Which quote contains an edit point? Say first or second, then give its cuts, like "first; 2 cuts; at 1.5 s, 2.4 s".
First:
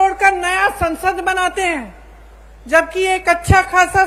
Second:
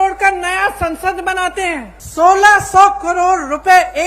second; 1 cut; at 2.0 s